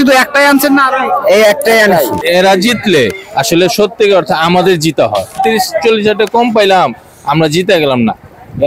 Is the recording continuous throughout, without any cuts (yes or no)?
no